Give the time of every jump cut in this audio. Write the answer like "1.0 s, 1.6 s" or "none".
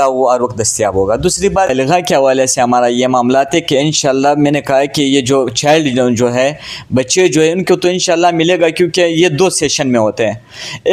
1.7 s

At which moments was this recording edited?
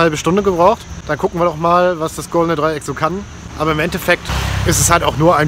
none

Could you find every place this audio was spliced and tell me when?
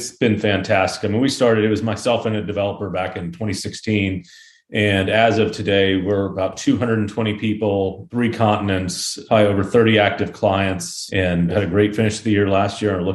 none

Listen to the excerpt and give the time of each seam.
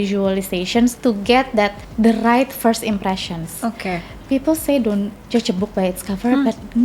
1.0 s, 1.8 s

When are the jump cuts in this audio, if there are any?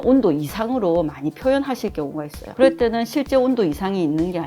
2.4 s

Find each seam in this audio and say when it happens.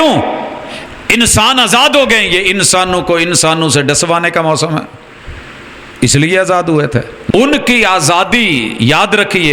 7.1 s

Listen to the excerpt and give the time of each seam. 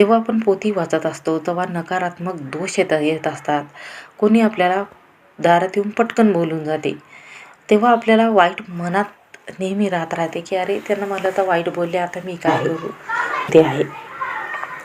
12.5 s

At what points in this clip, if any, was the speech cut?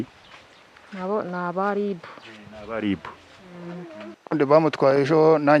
4.2 s

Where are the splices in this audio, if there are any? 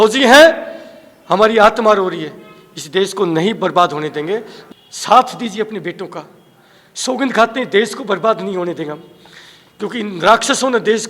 4.6 s

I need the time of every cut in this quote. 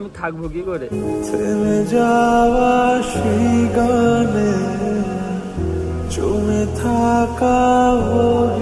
none

